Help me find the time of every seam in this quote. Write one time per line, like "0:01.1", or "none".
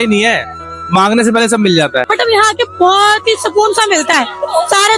0:02.0